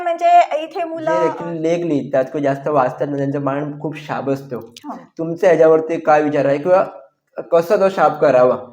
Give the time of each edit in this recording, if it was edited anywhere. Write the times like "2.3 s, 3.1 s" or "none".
1.0 s